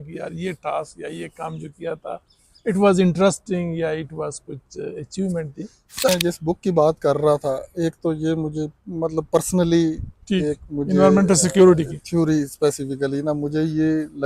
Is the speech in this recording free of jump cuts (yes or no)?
no